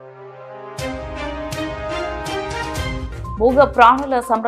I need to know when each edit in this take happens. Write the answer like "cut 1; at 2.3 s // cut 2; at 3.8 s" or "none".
cut 1; at 3.1 s